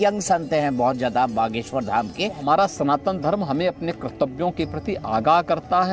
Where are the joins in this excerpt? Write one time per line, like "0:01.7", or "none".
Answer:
0:02.4